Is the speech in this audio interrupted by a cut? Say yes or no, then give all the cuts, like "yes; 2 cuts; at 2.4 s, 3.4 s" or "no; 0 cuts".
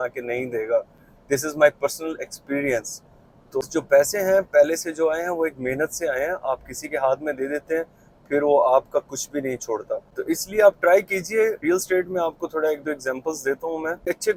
no; 0 cuts